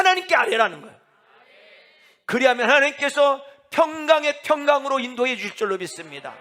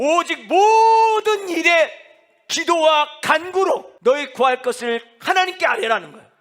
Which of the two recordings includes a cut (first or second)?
second